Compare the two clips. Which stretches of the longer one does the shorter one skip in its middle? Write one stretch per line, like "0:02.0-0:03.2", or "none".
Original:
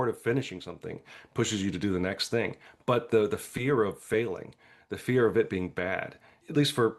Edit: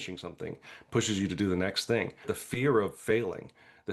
0:02.8-0:03.4